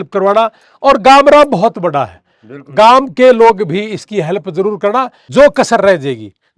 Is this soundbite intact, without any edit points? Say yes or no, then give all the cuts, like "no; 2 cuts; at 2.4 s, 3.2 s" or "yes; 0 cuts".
no; 1 cut; at 5.2 s